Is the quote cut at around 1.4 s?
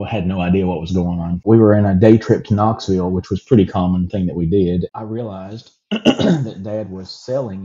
yes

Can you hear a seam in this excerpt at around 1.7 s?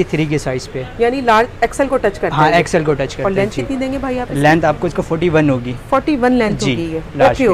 no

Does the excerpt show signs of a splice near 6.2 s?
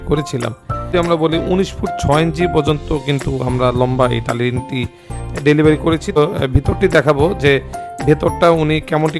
yes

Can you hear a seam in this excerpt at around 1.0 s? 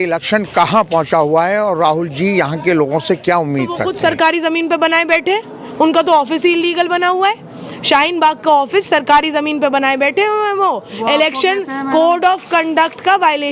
no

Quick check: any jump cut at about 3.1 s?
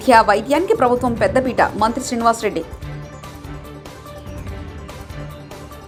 no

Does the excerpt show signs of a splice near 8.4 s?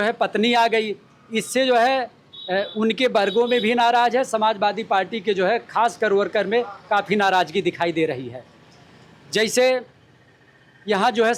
no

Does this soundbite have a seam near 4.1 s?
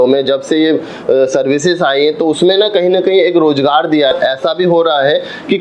yes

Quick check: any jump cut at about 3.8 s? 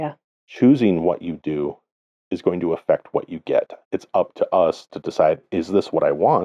yes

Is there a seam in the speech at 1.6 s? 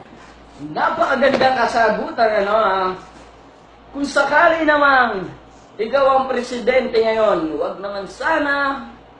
no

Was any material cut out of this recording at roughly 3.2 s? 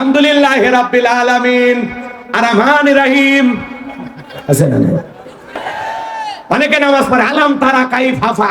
no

